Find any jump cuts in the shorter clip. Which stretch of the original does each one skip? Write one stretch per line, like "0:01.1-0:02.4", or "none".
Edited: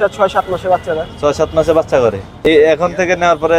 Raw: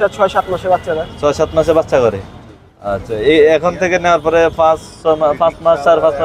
0:02.5-0:03.3

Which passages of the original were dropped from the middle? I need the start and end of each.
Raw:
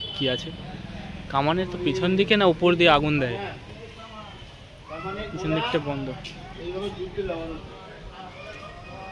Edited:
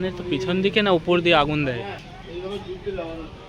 0:03.6-0:06.4

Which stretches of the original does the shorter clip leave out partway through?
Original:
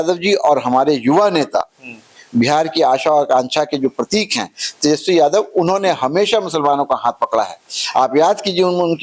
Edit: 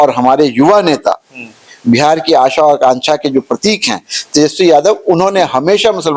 none

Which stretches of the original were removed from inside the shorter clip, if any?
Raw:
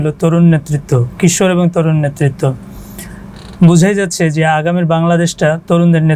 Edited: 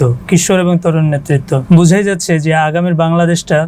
0:02.5-0:03.5

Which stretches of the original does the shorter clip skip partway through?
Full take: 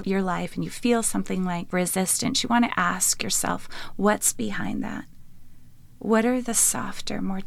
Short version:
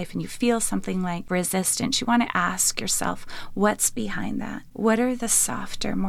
0:05.0-0:05.9

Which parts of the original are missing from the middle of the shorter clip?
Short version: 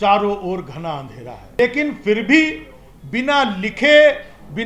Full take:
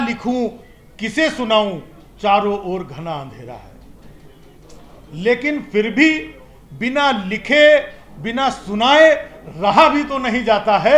0:03.8-0:05.2

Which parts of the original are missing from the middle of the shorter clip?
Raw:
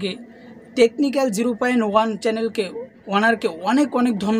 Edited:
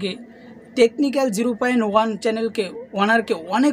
0:02.8-0:03.0

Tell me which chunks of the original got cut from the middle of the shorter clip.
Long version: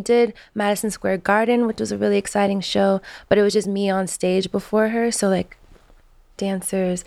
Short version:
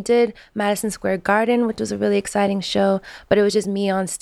none

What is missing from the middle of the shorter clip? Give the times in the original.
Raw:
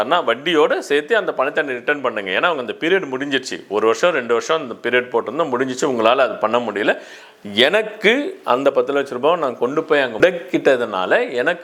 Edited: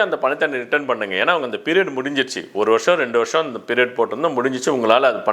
none

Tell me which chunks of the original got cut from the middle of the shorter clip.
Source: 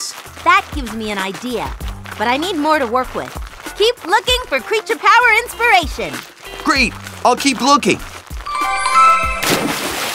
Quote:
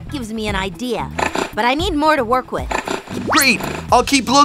0:03.6-0:06.3

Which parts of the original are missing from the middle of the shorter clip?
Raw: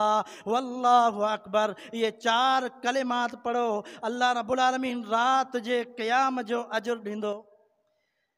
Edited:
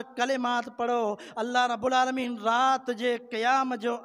none

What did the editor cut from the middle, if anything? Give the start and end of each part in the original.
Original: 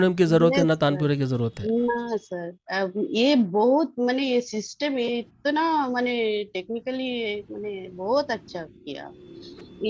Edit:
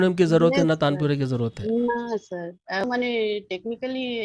0:02.8-0:05.9

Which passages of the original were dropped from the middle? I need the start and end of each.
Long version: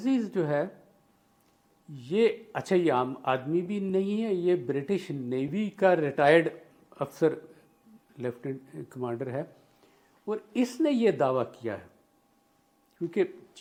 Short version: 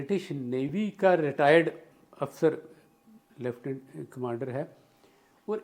none

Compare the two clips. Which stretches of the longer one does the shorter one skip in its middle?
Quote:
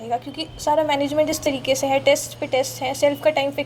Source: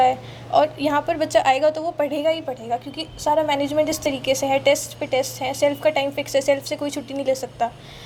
none

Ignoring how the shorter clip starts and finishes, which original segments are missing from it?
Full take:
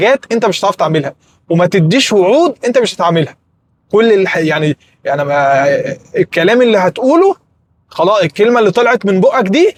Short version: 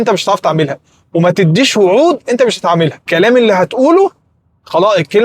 0:03.4-0:06.3

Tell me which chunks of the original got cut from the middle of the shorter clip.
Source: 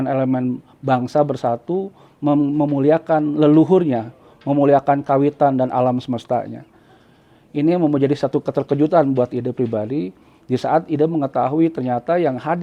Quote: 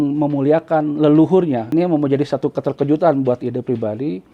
0:04.1-0:07.6

